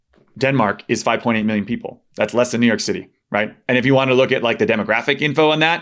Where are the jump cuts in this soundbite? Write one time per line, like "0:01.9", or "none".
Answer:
none

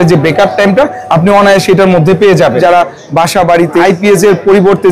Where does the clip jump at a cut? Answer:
0:02.6
0:03.8

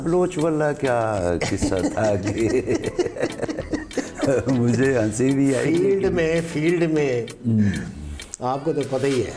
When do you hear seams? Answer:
none

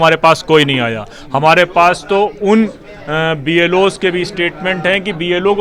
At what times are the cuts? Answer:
none

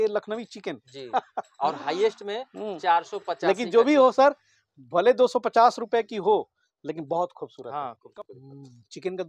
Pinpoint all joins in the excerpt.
0:08.0

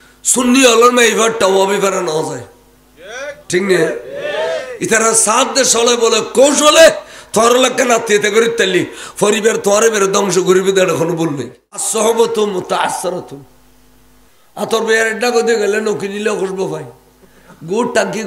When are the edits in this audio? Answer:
0:11.9

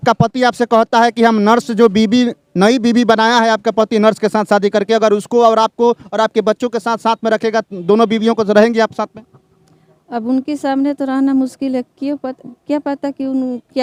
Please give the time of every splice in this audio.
none

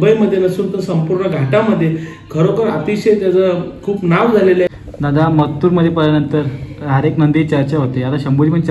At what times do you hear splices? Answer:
0:04.7

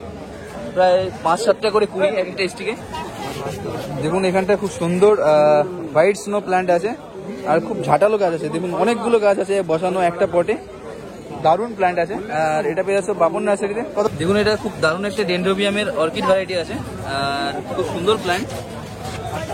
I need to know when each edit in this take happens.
0:02.9
0:14.1

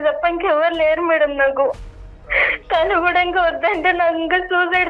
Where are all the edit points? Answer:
0:01.9

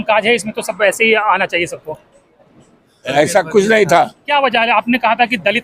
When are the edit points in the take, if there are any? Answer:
0:04.2

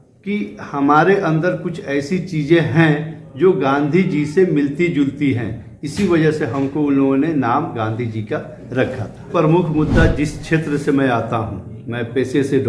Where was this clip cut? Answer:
0:09.3

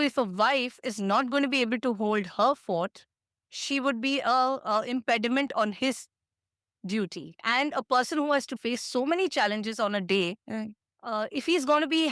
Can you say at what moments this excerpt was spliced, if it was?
0:07.3
0:08.6

